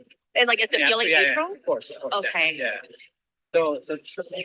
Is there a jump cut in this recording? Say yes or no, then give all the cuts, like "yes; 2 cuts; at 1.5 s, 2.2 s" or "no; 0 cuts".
no; 0 cuts